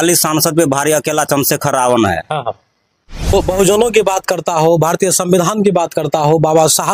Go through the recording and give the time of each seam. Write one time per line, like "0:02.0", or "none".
0:03.3